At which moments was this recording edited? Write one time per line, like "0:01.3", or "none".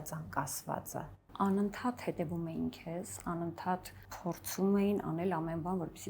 none